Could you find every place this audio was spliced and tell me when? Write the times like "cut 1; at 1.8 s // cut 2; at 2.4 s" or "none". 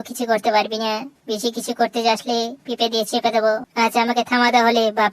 cut 1; at 3.7 s